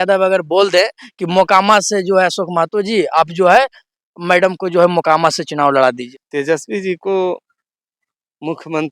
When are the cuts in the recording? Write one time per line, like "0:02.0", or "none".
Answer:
0:06.1